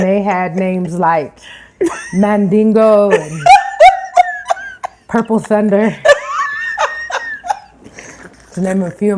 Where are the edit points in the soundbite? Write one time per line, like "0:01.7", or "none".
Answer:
none